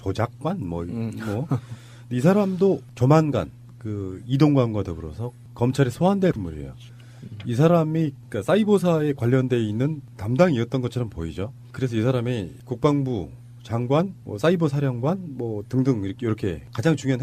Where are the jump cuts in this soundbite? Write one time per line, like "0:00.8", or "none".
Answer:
none